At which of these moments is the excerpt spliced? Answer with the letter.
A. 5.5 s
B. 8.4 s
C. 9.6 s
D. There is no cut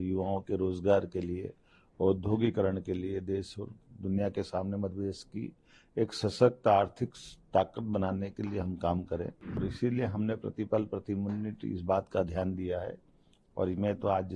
C